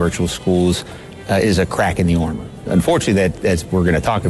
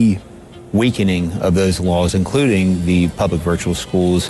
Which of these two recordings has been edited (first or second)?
first